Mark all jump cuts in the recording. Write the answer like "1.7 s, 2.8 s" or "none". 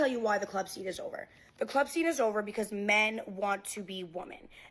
1.0 s